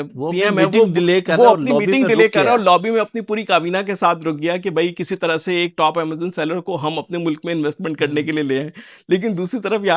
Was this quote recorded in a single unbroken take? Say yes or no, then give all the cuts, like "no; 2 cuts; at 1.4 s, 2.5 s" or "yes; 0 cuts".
yes; 0 cuts